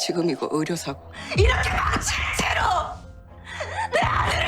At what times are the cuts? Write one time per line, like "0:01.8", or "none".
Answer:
0:01.1